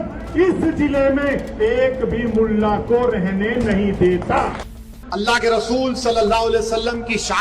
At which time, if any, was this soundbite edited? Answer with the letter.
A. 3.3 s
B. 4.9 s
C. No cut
B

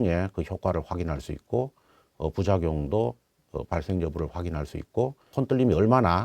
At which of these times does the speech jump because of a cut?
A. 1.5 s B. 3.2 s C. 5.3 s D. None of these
C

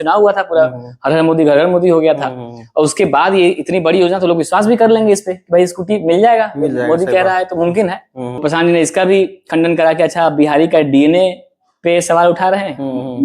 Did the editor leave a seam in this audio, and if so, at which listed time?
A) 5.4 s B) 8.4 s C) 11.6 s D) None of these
B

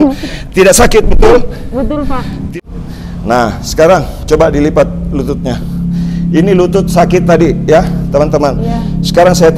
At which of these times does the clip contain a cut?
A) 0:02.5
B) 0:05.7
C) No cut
A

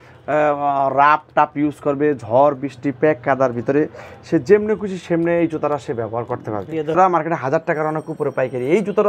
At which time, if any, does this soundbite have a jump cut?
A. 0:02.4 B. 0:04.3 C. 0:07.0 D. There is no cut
C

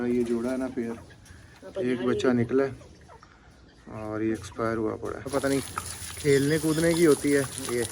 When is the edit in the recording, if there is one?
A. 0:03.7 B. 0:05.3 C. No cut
B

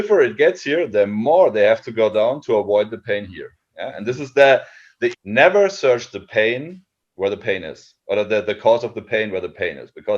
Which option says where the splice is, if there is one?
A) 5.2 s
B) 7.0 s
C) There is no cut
A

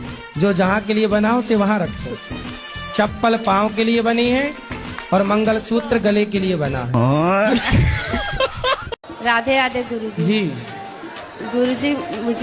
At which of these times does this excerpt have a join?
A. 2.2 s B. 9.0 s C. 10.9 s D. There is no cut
B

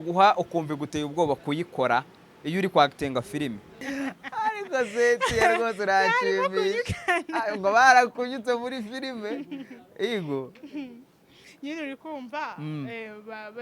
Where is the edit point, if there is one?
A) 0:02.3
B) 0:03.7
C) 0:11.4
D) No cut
B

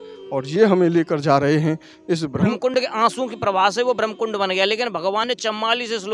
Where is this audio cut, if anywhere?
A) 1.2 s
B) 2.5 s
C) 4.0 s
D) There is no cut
B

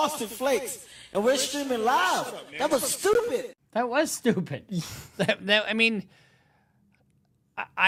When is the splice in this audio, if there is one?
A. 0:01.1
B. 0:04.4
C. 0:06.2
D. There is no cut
D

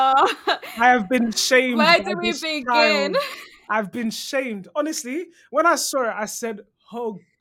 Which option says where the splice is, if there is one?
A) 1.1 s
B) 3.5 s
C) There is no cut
C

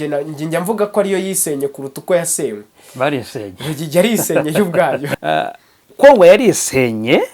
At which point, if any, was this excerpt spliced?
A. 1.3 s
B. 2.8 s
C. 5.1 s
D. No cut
C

